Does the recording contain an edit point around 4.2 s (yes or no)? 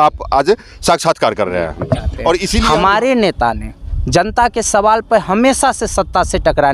no